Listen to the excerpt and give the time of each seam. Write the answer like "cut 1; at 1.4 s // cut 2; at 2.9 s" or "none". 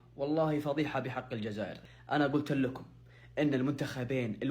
cut 1; at 1.8 s